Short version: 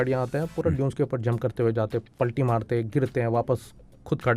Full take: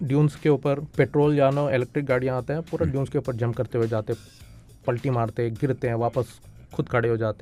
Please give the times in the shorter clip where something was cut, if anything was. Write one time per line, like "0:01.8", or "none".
0:02.1

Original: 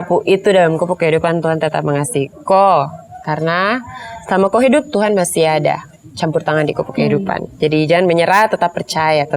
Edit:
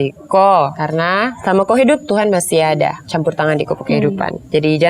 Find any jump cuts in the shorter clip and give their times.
0:01.0
0:03.0

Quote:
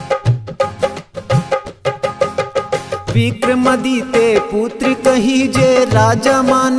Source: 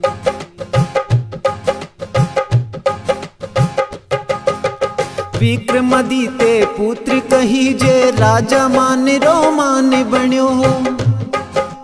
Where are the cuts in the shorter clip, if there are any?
0:01.6

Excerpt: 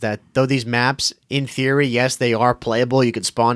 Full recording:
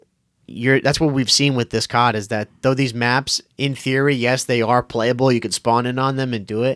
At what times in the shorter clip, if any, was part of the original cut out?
none

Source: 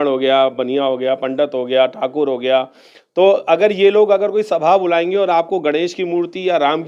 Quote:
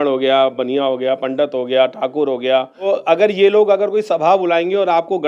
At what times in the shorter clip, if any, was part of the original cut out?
0:02.9

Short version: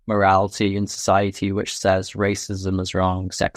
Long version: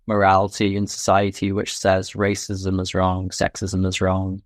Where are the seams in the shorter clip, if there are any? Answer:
none

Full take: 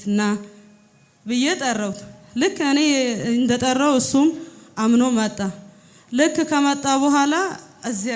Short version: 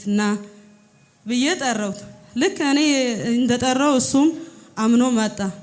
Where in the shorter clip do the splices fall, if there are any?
none

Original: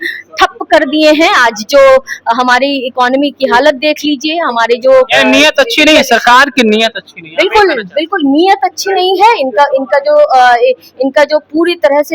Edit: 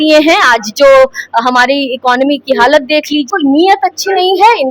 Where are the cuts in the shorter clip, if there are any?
0:03.3

